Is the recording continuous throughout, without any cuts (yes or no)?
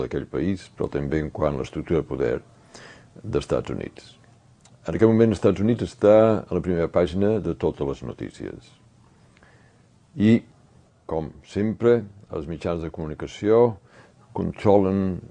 no